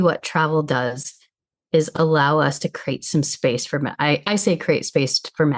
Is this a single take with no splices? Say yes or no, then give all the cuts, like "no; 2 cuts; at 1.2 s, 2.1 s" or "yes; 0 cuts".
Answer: yes; 0 cuts